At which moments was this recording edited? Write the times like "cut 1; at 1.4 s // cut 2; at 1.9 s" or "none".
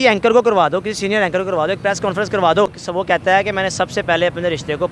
cut 1; at 2.8 s